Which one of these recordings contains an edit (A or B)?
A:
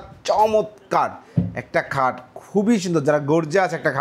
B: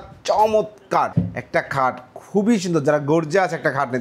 B